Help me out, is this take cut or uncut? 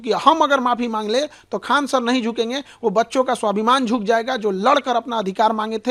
uncut